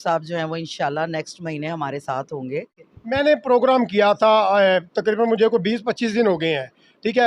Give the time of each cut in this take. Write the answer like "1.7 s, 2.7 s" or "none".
2.8 s